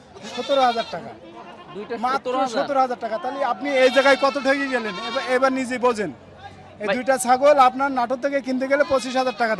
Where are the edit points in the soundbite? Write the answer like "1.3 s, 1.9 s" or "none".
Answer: none